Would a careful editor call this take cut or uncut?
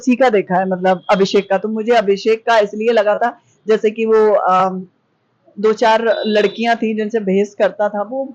uncut